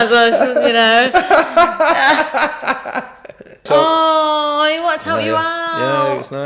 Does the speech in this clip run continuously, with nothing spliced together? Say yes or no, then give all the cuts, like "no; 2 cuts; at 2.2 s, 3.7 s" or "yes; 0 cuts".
no; 1 cut; at 3.6 s